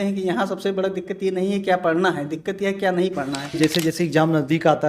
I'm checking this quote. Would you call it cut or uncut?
cut